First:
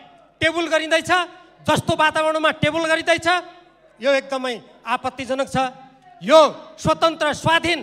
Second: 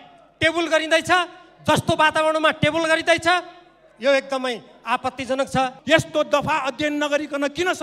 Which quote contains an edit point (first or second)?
second